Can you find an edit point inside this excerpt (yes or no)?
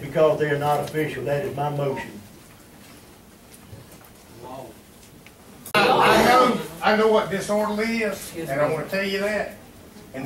yes